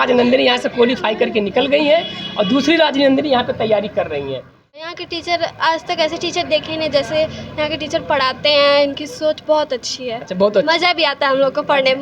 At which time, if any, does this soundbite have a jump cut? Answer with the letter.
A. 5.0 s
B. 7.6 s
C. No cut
A